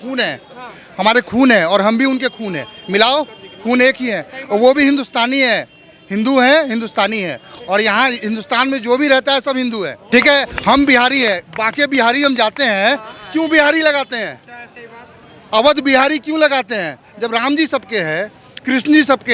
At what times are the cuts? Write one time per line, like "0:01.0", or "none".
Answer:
none

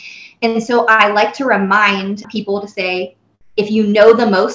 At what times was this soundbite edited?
0:02.2

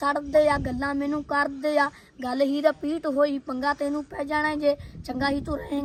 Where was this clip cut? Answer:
none

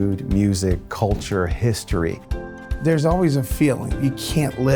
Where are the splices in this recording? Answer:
0:02.5

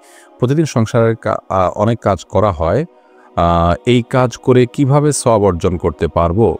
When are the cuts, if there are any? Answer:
none

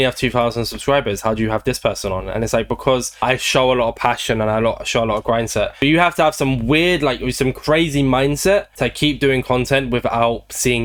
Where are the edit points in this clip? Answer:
none

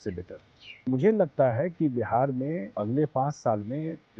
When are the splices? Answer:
0:00.9
0:02.8

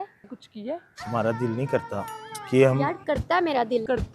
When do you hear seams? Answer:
0:00.9

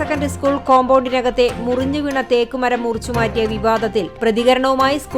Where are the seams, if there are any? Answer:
none

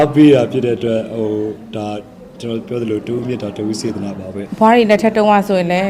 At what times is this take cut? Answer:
0:04.5

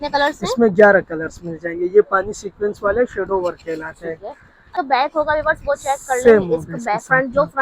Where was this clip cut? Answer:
0:04.7

